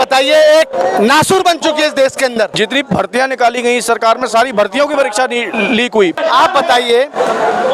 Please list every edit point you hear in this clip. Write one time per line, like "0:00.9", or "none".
0:02.5
0:06.1